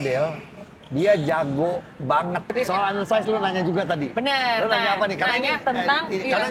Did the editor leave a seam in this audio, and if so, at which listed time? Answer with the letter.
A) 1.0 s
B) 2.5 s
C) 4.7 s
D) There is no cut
B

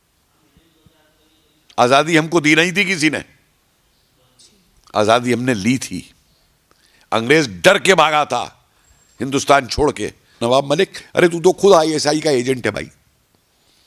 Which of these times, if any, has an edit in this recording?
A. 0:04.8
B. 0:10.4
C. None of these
B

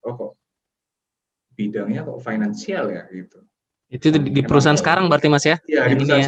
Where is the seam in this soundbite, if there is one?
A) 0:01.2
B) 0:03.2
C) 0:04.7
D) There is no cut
D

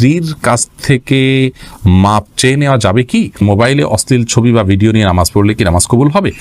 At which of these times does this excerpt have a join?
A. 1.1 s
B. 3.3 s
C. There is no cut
B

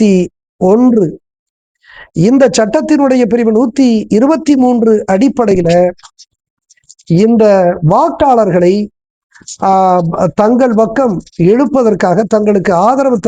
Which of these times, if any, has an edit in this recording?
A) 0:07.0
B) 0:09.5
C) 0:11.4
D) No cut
D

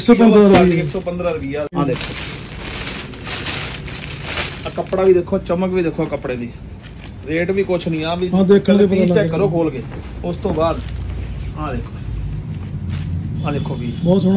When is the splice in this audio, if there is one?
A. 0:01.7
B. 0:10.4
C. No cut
A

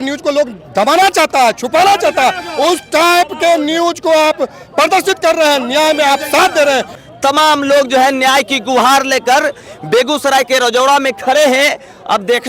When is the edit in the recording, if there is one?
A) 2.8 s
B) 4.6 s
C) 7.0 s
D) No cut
C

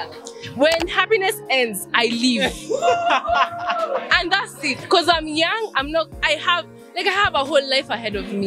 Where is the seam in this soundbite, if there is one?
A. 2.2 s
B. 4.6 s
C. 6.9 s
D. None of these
D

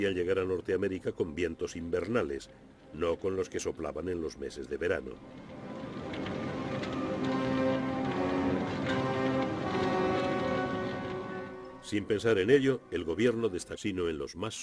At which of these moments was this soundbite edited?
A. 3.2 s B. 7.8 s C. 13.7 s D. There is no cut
D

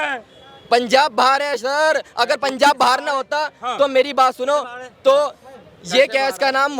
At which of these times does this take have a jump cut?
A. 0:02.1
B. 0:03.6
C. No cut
C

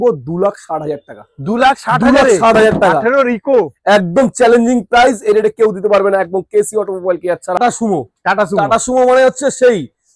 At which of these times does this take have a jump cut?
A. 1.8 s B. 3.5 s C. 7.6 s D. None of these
C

